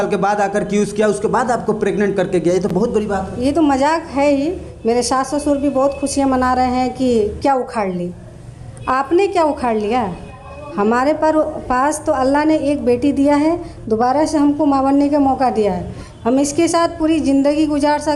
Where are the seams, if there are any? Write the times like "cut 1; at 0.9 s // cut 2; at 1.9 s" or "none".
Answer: none